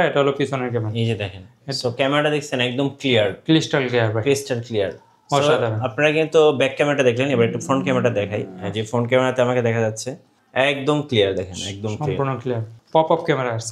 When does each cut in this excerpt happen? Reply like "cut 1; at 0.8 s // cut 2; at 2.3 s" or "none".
cut 1; at 12.7 s

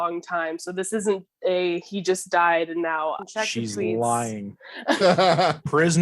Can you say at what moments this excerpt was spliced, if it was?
cut 1; at 3.2 s

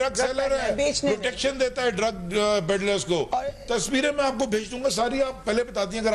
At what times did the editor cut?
none

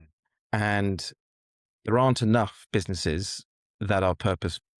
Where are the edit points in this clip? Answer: cut 1; at 1.9 s

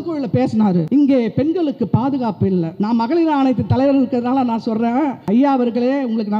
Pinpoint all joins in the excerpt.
cut 1; at 0.9 s // cut 2; at 2.7 s // cut 3; at 5.2 s

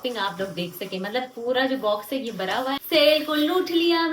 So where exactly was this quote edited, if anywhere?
cut 1; at 2.8 s

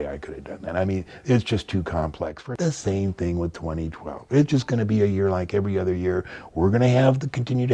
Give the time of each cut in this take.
cut 1; at 2.4 s

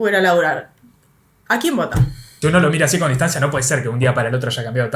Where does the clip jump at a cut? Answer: cut 1; at 2.3 s

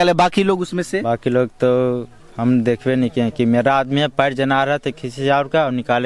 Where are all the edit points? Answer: none

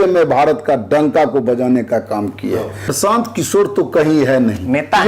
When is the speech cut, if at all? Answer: cut 1; at 2.8 s

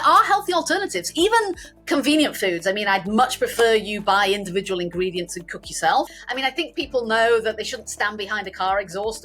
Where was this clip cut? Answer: cut 1; at 6.2 s

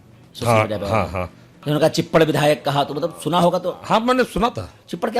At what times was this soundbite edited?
cut 1; at 1.6 s

